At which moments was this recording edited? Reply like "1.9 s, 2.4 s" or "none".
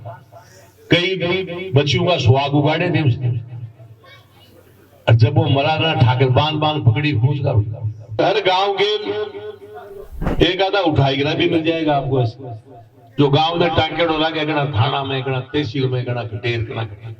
8.2 s